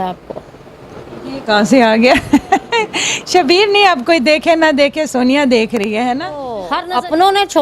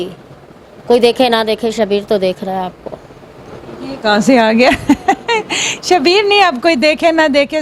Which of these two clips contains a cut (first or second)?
first